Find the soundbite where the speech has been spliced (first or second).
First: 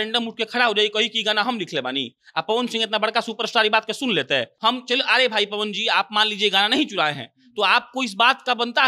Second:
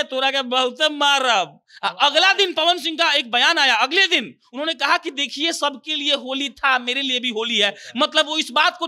first